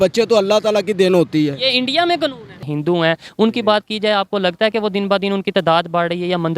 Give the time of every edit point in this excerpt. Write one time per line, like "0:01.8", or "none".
0:02.6